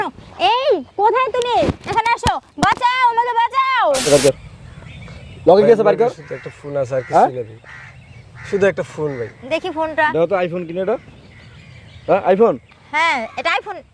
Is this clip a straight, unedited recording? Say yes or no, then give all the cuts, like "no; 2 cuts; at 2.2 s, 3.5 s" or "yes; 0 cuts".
no; 1 cut; at 4.0 s